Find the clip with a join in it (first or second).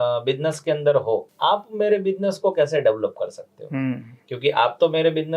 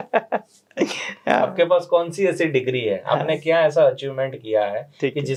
first